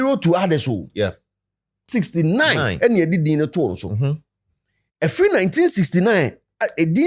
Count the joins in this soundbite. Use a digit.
1